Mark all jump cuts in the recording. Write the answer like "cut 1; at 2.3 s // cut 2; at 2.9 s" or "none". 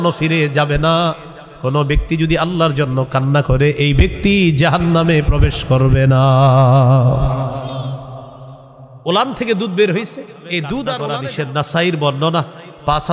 cut 1; at 11.2 s